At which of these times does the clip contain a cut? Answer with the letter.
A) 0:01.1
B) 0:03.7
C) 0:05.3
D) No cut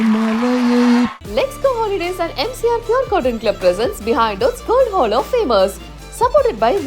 A